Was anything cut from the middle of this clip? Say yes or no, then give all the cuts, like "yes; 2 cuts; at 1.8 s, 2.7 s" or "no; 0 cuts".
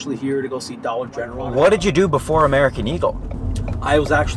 yes; 1 cut; at 1.5 s